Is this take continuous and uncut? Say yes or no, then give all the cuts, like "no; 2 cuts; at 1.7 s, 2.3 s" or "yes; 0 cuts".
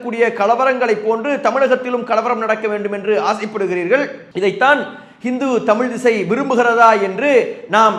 yes; 0 cuts